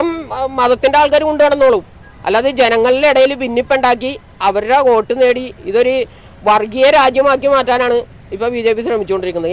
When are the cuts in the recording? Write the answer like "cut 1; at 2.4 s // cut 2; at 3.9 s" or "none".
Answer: none